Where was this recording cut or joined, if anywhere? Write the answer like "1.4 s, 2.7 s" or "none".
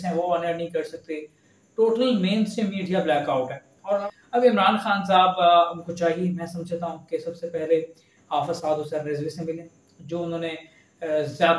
4.0 s